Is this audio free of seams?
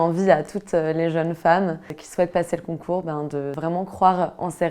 no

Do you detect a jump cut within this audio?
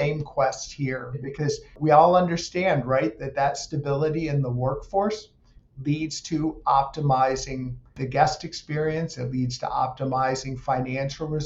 yes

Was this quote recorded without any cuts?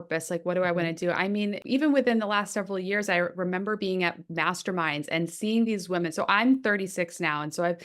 no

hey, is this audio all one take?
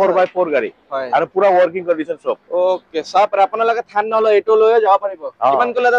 yes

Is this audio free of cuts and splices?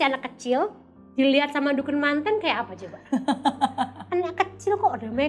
yes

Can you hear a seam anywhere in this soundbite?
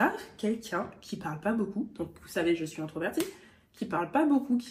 no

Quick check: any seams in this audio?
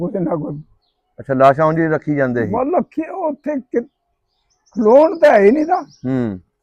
no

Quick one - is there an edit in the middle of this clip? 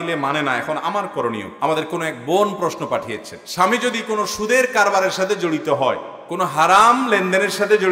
no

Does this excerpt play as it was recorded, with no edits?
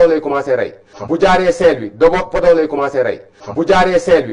no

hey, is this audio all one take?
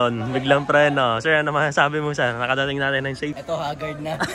yes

